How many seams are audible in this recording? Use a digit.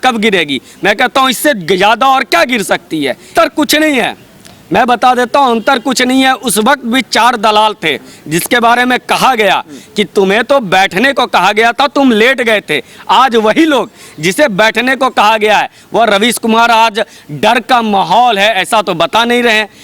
1